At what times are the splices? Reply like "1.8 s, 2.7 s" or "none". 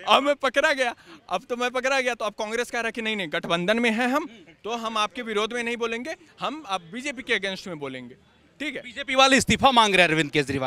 none